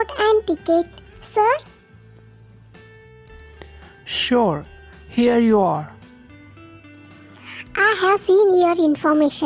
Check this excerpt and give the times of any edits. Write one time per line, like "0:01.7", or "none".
0:05.9
0:07.7